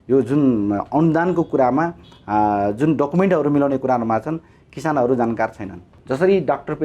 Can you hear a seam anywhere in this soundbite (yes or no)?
yes